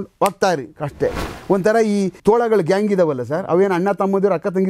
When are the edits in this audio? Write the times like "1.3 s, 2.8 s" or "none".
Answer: 1.3 s, 2.2 s